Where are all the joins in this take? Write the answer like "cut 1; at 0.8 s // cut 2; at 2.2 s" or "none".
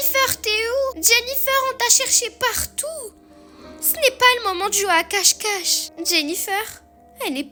none

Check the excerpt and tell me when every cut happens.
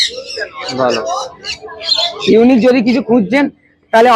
none

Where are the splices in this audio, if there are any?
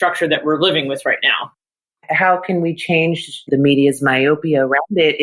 cut 1; at 1.8 s // cut 2; at 3.4 s

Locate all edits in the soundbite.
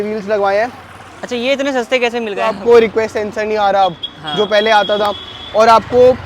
cut 1; at 2.5 s

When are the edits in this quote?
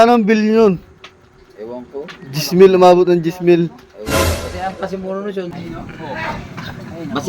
cut 1; at 5.5 s

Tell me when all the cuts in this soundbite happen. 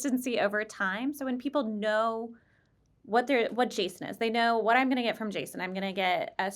none

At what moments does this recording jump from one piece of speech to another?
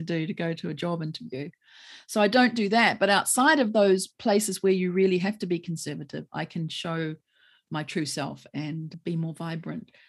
cut 1; at 9.0 s

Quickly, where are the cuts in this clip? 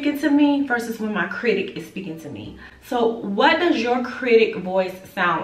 none

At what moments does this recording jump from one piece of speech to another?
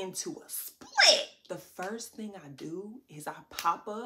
cut 1; at 1.4 s

